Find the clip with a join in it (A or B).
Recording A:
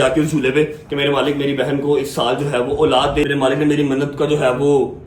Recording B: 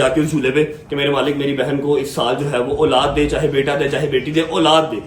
A